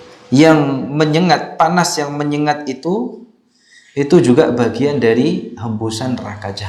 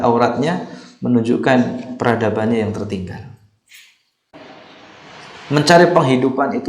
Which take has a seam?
second; 1 cut; at 4.3 s

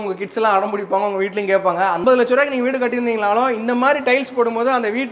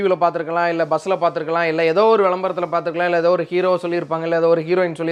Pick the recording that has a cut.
first; 1 cut; at 2.0 s

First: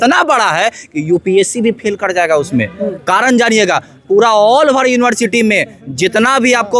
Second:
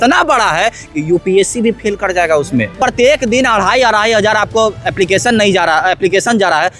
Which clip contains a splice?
second; 1 cut; at 2.8 s

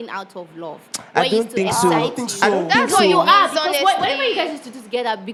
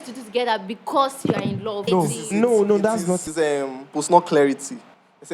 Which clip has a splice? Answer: second; 2 cuts; at 1.8 s, 3.3 s

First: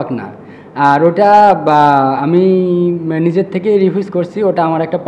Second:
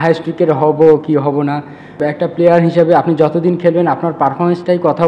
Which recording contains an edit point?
second; 1 cut; at 2.0 s

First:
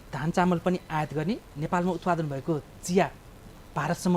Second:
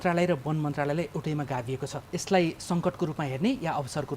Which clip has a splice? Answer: second; 1 cut; at 2.0 s

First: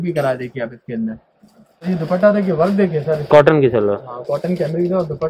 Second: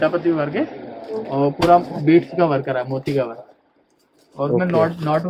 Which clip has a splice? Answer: first; 1 cut; at 1.8 s

